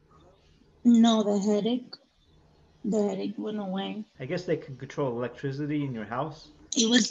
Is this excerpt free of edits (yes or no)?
yes